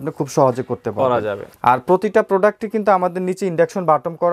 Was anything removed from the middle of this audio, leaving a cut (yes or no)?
yes